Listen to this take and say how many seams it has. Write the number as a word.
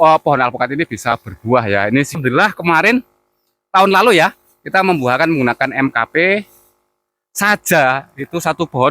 one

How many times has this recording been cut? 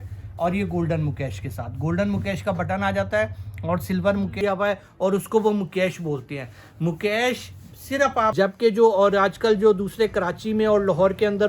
two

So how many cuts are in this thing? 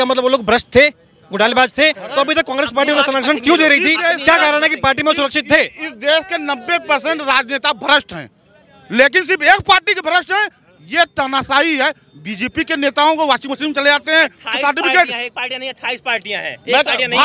zero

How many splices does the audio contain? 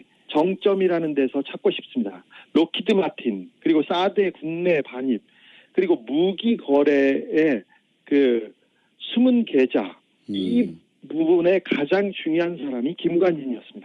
zero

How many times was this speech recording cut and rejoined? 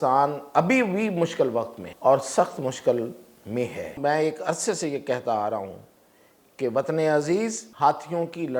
three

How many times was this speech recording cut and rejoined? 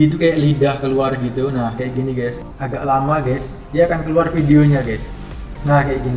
one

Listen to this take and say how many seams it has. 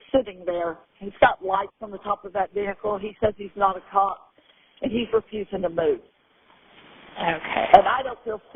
zero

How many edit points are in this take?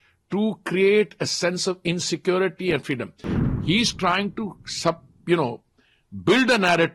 one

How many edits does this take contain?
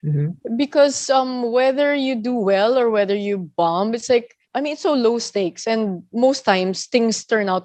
zero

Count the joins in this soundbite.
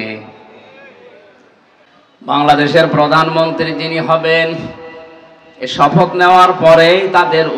one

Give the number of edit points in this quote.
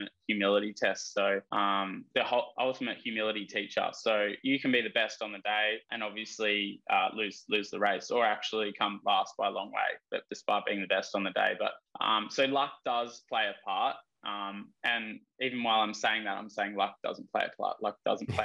four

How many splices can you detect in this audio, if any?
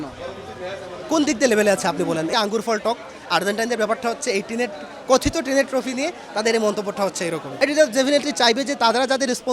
two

